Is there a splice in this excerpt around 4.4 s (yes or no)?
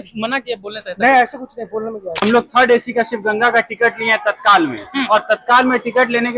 no